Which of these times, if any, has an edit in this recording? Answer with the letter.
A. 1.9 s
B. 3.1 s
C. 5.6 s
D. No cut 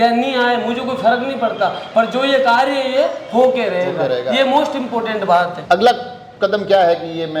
C